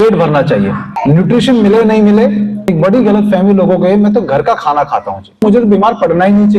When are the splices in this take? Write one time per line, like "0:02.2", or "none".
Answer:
0:00.9
0:02.6
0:05.4